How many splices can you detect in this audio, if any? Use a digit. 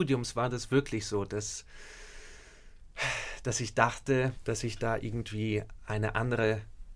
1